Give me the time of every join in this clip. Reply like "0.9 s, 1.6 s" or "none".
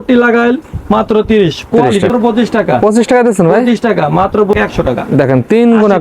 2.1 s, 4.5 s